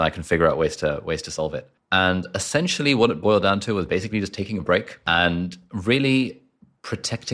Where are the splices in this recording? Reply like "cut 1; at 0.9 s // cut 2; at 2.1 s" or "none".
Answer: cut 1; at 1.7 s // cut 2; at 5.1 s